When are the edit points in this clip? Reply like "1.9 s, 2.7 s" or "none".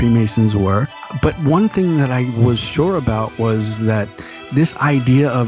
1.0 s